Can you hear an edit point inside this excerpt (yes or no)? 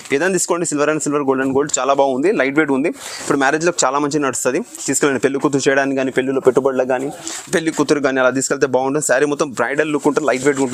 no